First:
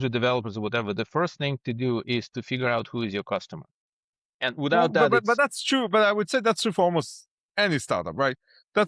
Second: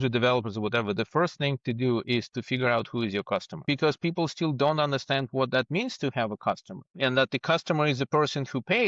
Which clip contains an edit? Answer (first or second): second